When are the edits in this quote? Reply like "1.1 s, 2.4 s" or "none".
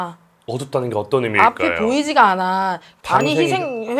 2.9 s